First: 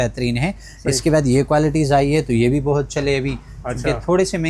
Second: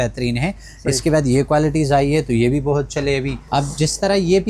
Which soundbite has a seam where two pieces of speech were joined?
second; 1 cut; at 3.4 s

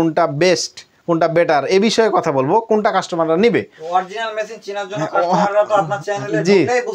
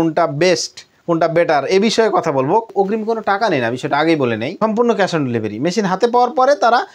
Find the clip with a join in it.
second; 2 cuts; at 2.7 s, 4.5 s

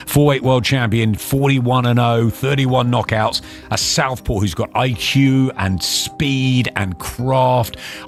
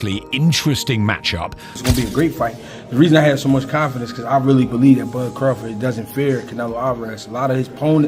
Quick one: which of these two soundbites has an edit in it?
second; 1 cut; at 1.8 s

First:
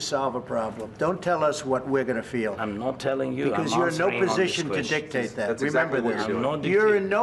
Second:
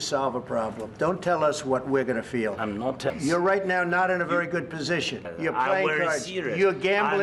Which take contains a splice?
second; 2 cuts; at 3.1 s, 5.3 s

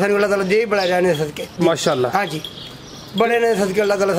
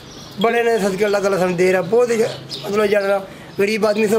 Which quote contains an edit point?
first; 1 cut; at 1.4 s

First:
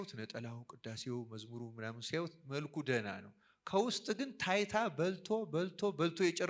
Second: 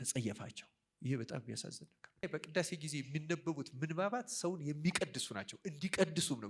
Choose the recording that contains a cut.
second; 1 cut; at 2.2 s

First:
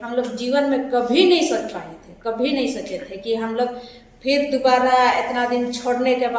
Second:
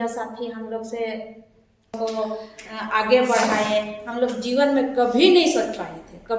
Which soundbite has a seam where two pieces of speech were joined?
second; 1 cut; at 1.9 s

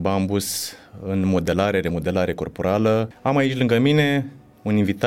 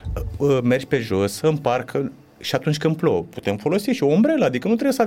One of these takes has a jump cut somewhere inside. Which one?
first; 1 cut; at 3.1 s

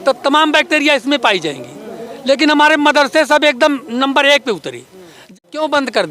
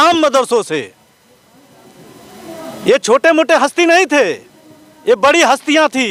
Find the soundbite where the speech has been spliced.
first; 1 cut; at 4.8 s

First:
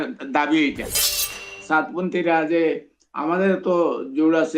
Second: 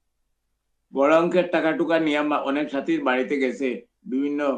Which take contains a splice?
first; 1 cut; at 1.0 s

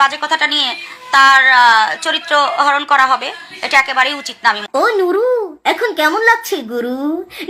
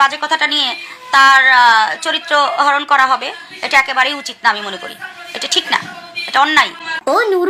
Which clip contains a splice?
first; 1 cut; at 4.6 s

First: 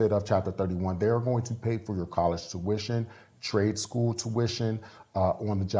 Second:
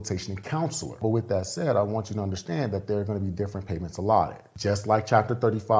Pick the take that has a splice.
second; 2 cuts; at 1.0 s, 4.5 s

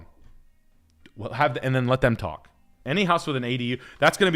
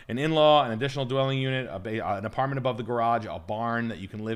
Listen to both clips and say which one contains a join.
first; 1 cut; at 2.7 s

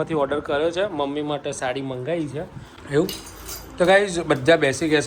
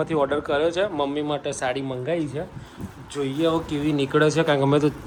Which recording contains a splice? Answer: first; 1 cut; at 2.8 s

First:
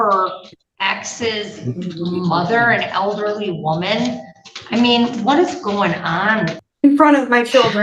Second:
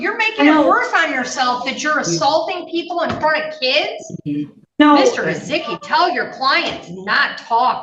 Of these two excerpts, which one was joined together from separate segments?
first; 1 cut; at 6.6 s

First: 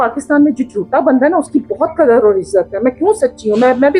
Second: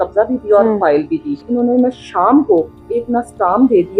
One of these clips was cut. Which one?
second; 2 cuts; at 1.4 s, 2.8 s

